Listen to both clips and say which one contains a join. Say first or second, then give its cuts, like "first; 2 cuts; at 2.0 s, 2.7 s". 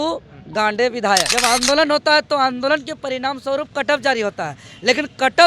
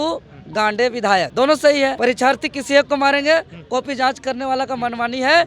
first; 1 cut; at 1.3 s